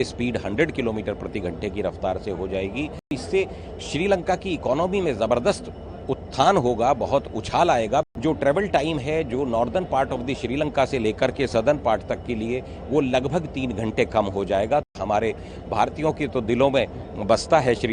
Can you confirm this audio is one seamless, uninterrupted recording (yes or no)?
no